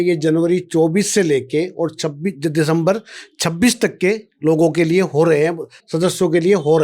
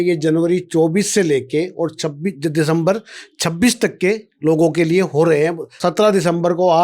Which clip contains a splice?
second; 1 cut; at 5.8 s

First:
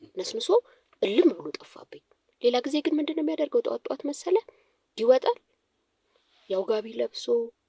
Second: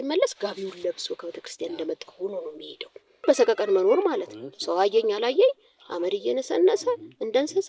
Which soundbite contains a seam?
second; 1 cut; at 3.2 s

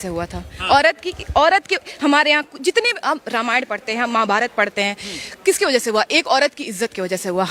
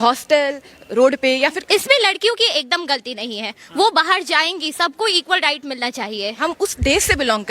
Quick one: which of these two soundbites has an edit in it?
second; 2 cuts; at 1.6 s, 6.4 s

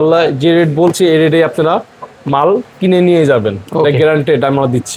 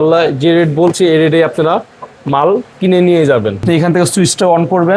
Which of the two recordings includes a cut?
second; 1 cut; at 3.6 s

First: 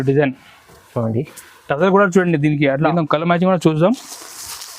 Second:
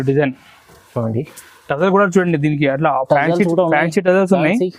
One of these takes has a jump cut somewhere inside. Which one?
first; 1 cut; at 2.9 s

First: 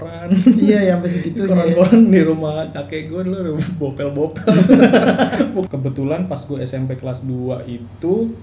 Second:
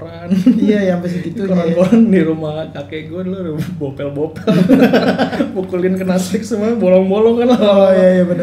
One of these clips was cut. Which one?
first; 1 cut; at 5.7 s

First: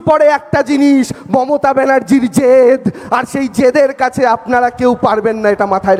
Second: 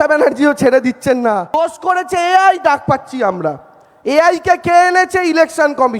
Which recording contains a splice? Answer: second; 1 cut; at 1.6 s

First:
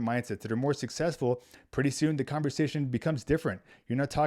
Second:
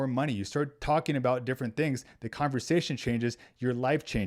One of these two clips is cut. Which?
first; 1 cut; at 1.6 s

